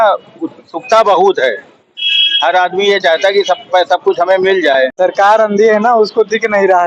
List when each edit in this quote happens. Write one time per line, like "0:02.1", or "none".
0:04.9